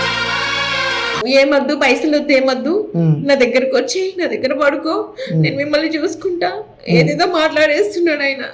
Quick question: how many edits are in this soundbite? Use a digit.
1